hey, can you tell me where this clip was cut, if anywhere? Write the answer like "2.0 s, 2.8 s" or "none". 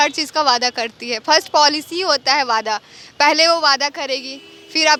none

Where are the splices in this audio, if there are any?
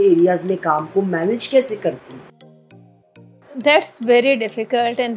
none

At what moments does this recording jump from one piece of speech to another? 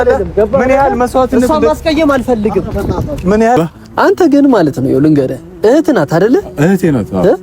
3.6 s

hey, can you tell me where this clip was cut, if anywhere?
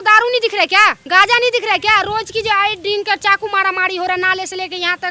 1.0 s

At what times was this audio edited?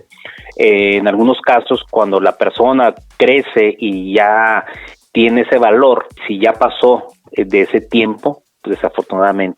6.2 s

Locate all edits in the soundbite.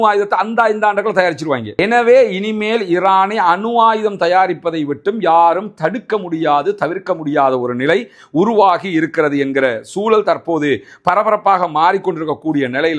none

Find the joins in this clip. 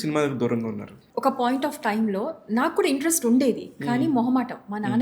1.0 s

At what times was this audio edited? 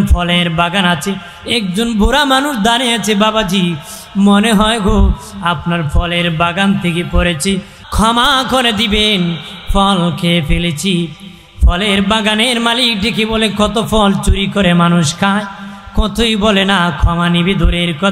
7.8 s

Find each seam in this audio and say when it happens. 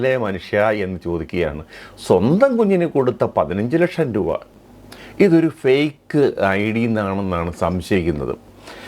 4.5 s

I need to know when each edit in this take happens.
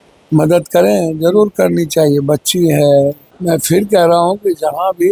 3.3 s

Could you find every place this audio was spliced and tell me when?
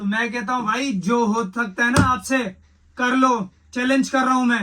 none

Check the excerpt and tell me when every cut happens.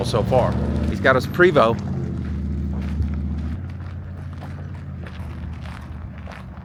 none

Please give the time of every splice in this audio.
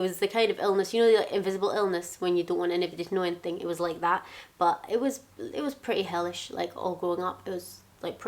none

